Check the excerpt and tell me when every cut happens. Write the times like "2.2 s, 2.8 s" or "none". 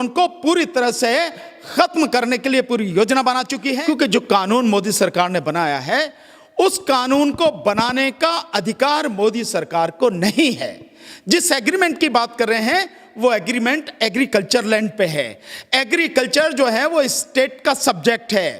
3.7 s